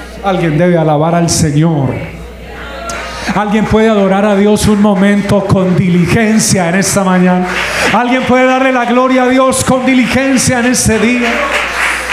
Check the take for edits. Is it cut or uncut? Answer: uncut